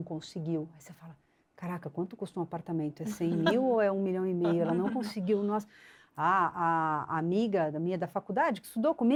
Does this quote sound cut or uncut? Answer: uncut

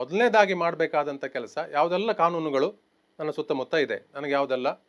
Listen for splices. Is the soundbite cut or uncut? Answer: uncut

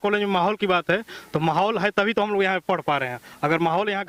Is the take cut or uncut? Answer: uncut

